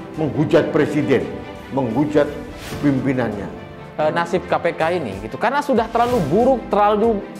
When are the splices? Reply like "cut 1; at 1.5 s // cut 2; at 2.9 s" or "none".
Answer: cut 1; at 3.8 s